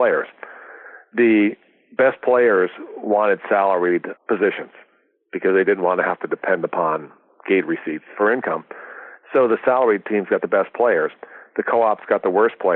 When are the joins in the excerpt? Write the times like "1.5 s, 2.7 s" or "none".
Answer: 4.1 s, 8.1 s